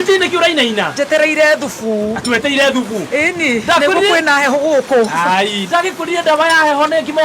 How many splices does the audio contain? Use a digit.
1